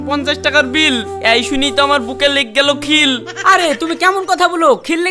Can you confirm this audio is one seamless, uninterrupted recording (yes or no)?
yes